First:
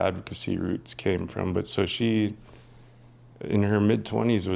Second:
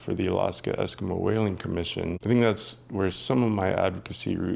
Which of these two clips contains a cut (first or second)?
second